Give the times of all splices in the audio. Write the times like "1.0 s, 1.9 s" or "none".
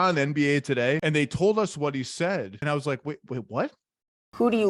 1.0 s, 2.6 s